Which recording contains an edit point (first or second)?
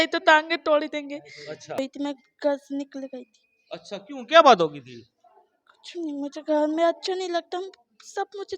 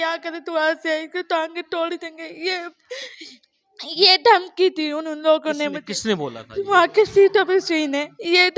first